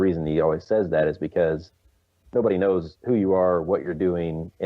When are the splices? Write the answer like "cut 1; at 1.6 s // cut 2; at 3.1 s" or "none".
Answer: cut 1; at 2.9 s